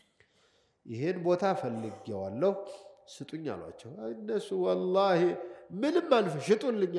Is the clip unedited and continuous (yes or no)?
yes